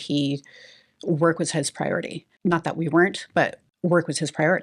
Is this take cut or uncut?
cut